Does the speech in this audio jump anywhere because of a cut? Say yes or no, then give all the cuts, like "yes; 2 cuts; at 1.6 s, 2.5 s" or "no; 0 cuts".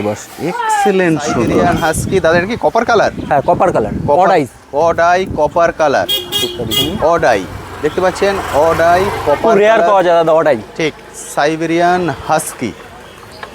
yes; 1 cut; at 1.5 s